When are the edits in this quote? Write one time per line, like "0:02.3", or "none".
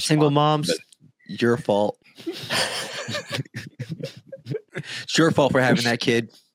0:02.4
0:05.0